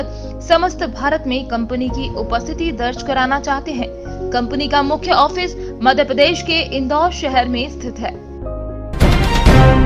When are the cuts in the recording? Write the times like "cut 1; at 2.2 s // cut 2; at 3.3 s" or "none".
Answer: cut 1; at 8.9 s